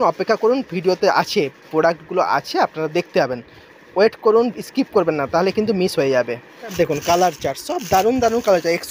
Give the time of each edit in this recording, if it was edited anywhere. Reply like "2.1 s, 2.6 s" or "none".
6.7 s